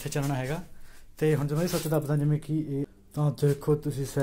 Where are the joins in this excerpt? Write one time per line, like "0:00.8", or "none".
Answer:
0:03.0